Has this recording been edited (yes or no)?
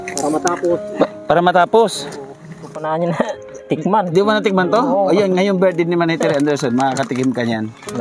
yes